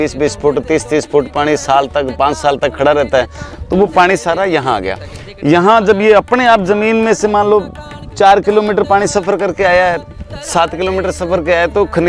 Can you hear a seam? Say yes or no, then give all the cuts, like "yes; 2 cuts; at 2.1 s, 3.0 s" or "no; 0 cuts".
no; 0 cuts